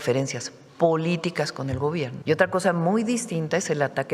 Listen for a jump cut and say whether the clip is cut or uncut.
cut